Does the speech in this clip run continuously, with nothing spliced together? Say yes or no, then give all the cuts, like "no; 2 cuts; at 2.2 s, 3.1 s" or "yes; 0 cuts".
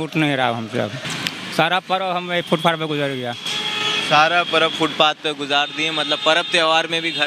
no; 1 cut; at 1.1 s